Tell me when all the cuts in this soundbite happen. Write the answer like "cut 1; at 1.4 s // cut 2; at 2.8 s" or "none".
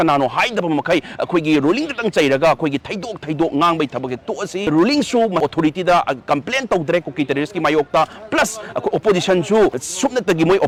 none